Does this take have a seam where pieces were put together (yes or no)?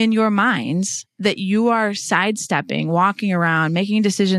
yes